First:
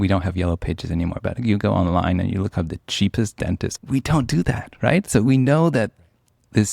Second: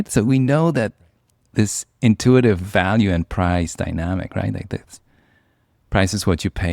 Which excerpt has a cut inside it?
first; 1 cut; at 3.7 s

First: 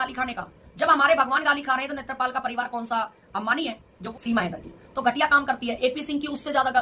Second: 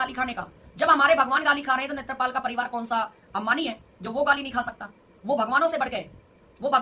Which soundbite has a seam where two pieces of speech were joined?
first; 1 cut; at 3.9 s

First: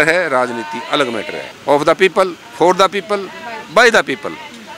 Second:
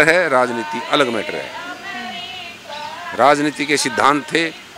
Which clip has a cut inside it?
first; 1 cut; at 1.4 s

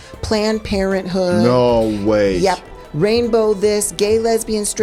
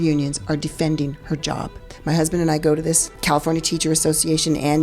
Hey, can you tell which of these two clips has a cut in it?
second; 2 cuts; at 1.9 s, 3.1 s

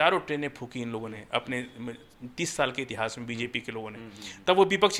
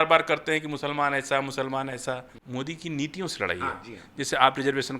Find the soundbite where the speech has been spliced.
second; 1 cut; at 2.3 s

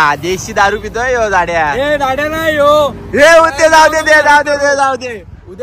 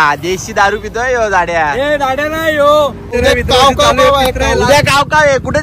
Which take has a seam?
second; 1 cut; at 3.1 s

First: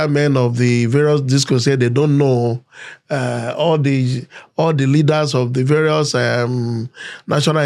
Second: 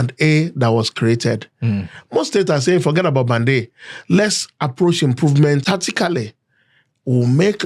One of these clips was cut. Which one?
second; 1 cut; at 5.6 s

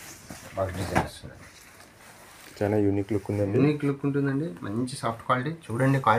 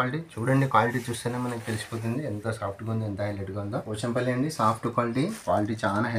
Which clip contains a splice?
second; 2 cuts; at 3.8 s, 5.4 s

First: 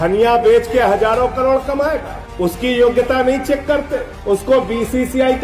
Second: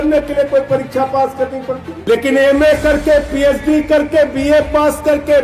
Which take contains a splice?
second; 1 cut; at 1.9 s

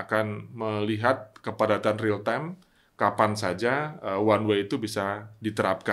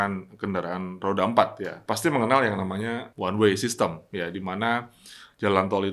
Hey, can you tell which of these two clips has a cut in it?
second; 1 cut; at 1.7 s

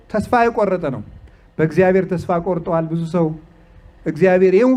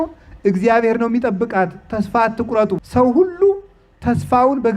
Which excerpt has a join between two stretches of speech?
second; 1 cut; at 2.8 s

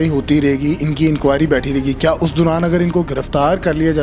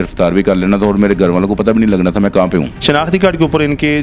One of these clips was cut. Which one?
second; 1 cut; at 2.7 s

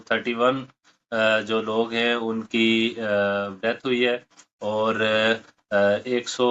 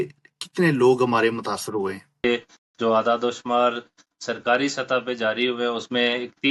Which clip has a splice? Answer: second; 1 cut; at 2.2 s

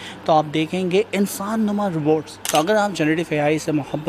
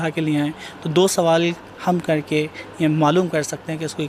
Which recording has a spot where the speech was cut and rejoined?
first; 1 cut; at 2.3 s

